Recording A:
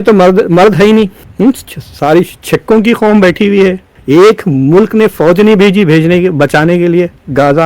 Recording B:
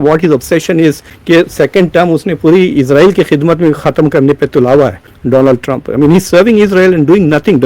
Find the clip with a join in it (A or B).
A